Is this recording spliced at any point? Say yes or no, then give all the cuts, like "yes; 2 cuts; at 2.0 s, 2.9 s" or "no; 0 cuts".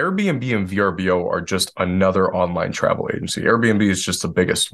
no; 0 cuts